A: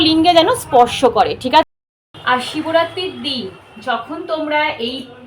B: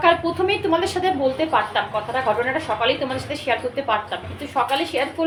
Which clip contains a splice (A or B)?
A